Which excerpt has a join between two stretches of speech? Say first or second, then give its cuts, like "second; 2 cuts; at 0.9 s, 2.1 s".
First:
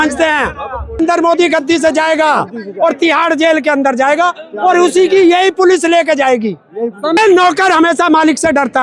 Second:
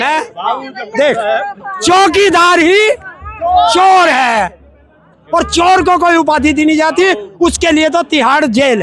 first; 2 cuts; at 1.0 s, 7.2 s